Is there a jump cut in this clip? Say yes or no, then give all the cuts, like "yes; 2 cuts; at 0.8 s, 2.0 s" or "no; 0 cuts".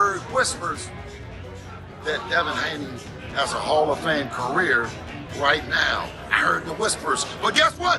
no; 0 cuts